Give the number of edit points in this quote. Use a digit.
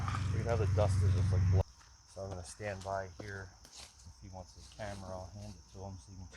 1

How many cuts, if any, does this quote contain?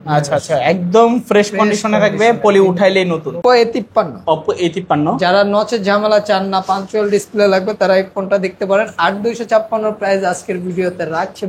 1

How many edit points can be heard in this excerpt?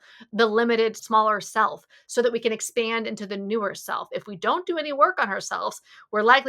2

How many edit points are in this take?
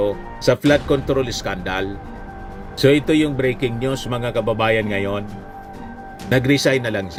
0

